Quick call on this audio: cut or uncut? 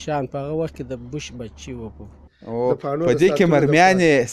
cut